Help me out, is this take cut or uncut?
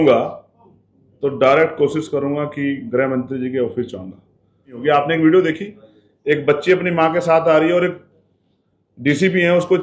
cut